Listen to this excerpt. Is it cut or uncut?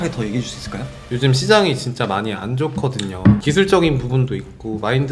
cut